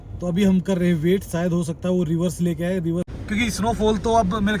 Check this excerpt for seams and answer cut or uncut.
cut